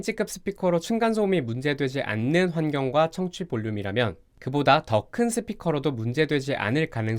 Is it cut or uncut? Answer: uncut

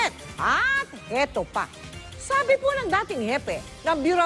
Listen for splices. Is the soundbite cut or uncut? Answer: cut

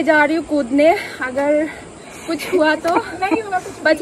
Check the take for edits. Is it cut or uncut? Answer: uncut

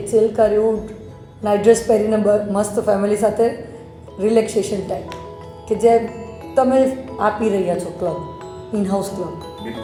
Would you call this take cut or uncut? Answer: uncut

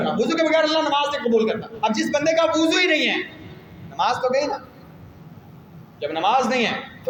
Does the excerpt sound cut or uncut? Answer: uncut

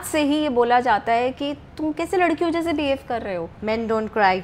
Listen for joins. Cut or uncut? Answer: cut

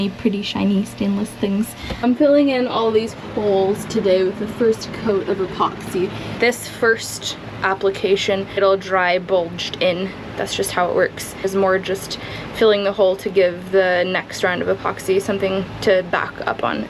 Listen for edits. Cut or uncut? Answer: cut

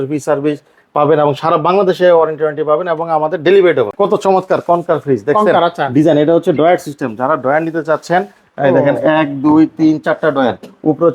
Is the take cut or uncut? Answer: cut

